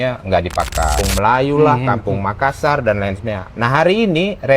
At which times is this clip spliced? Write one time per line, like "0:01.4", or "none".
0:00.9